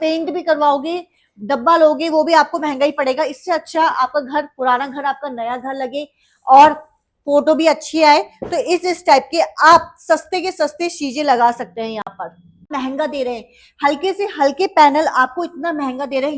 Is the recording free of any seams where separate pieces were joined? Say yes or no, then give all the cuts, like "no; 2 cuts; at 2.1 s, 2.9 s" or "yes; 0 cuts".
no; 1 cut; at 12.7 s